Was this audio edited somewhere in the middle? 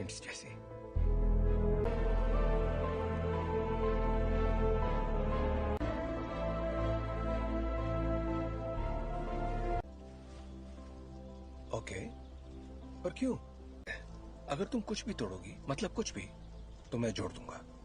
yes; 1 cut; at 1.9 s

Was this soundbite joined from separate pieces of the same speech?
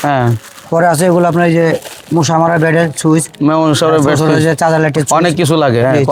no; 0 cuts

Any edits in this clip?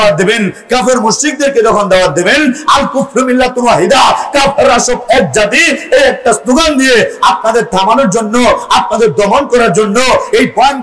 no; 0 cuts

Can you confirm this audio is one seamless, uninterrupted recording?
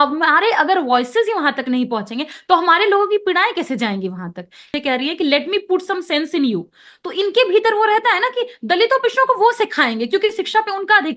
no; 1 cut; at 4.7 s

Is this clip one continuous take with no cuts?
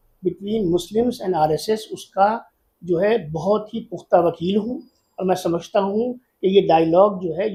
yes; 0 cuts

